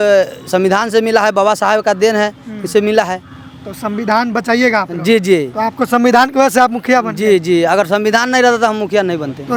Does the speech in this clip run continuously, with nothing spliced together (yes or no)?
yes